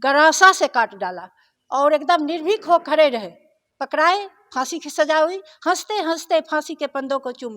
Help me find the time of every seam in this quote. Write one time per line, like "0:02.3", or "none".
none